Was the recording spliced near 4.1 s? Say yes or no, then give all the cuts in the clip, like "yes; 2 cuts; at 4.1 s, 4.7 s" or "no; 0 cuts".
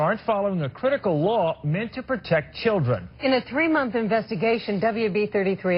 no; 0 cuts